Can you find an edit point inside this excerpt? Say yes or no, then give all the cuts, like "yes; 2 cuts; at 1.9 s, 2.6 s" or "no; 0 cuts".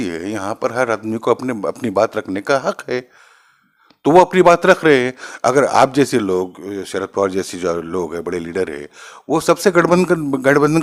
no; 0 cuts